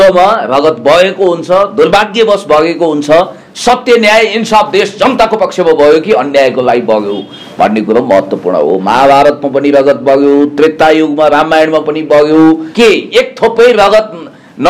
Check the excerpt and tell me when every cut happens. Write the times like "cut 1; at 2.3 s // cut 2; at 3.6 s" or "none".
cut 1; at 12.7 s